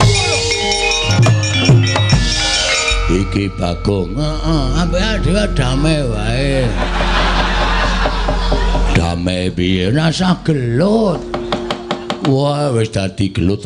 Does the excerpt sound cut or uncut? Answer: cut